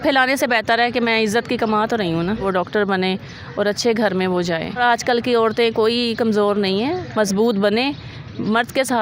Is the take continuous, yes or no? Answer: no